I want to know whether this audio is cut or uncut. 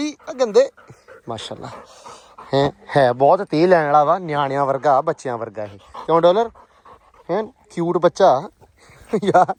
uncut